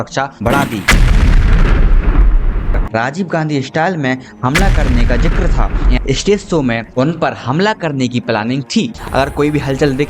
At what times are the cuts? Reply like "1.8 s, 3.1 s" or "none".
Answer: 2.8 s, 5.9 s, 9.0 s